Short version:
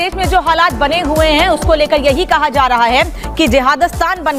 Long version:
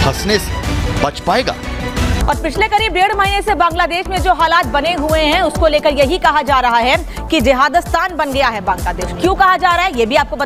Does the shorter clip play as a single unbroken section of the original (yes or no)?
yes